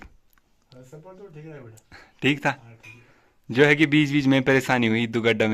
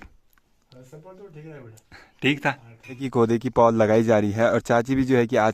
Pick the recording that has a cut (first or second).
second